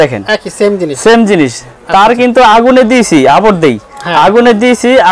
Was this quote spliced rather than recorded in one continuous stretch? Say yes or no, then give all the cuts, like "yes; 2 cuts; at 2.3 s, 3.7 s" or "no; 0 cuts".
no; 0 cuts